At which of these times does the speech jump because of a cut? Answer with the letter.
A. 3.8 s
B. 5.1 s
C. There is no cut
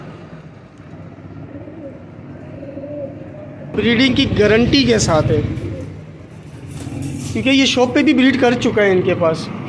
A